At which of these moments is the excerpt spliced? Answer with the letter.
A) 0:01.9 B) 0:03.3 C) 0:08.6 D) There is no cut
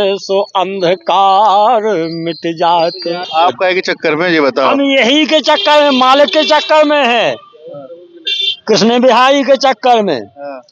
B